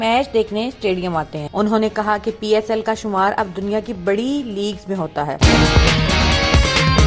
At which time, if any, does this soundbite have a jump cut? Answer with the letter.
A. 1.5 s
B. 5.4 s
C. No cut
B